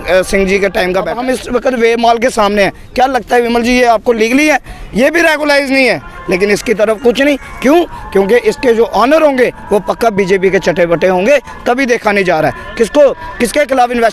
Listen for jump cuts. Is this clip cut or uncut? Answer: cut